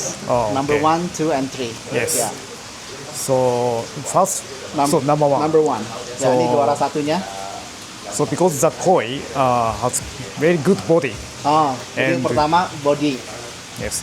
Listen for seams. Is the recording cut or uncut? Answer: uncut